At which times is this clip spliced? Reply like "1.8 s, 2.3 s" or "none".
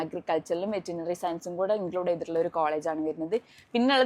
none